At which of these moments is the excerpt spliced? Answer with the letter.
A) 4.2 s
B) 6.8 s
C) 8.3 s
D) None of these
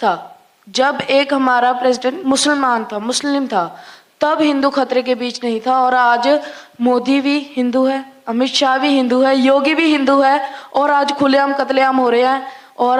D